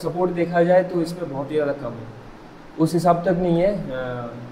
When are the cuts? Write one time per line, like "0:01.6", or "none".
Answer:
none

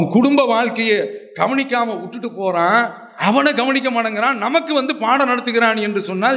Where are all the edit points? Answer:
none

